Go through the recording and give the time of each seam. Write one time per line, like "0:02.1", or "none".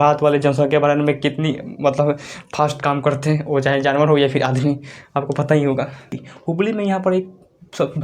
0:06.2

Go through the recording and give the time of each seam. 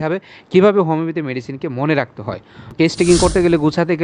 0:02.7

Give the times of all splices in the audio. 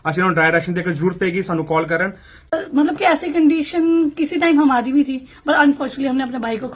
0:02.5

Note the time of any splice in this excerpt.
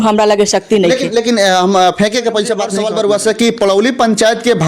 0:02.7

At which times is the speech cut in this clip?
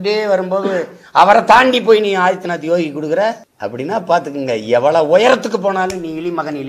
0:03.5

